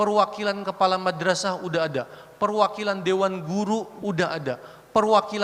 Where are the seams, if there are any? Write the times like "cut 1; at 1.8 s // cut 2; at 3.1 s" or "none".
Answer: cut 1; at 3.9 s